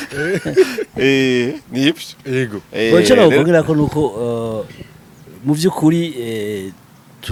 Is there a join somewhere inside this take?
no; 0 cuts

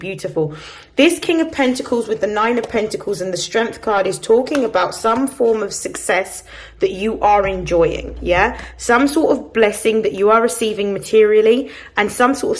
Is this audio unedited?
yes; 0 cuts

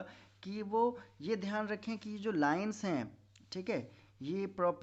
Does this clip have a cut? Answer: no; 0 cuts

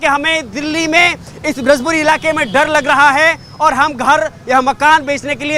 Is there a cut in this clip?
no; 0 cuts

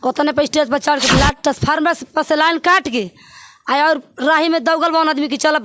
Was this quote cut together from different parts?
yes; 1 cut; at 1.1 s

